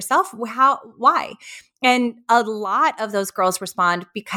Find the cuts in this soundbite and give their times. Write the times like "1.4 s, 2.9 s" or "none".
none